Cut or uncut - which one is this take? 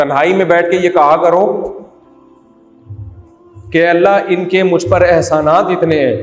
uncut